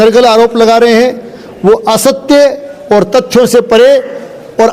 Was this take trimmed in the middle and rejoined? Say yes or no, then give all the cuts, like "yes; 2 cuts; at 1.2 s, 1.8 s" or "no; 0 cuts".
no; 0 cuts